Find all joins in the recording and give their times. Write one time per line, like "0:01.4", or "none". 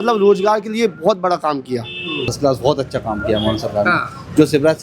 0:02.3

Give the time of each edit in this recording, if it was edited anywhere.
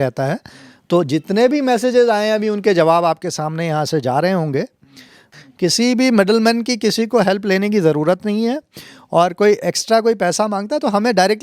0:05.3

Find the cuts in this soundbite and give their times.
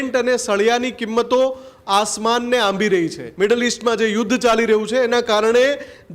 0:03.2

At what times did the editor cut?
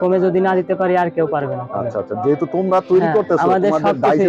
none

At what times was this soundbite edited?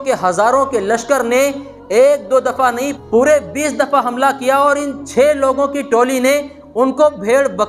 0:02.9

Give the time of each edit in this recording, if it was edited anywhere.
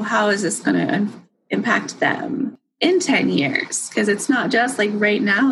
0:02.6

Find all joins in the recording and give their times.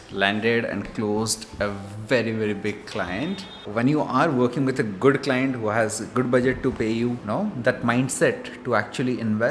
0:03.5
0:07.2

